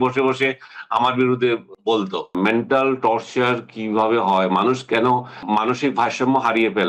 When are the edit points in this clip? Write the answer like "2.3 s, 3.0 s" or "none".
2.2 s, 5.4 s